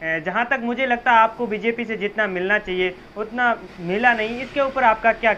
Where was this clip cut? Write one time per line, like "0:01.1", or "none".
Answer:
none